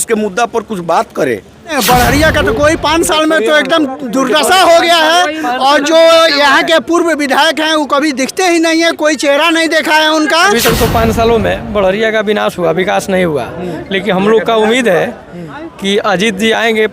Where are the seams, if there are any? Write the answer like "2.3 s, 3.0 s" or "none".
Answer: 1.7 s, 10.6 s